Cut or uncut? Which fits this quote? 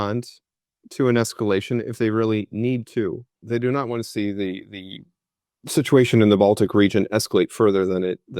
cut